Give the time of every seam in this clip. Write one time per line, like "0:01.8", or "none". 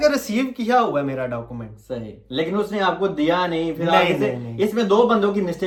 none